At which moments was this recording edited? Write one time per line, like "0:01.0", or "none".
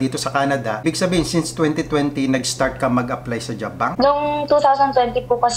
0:00.8
0:03.9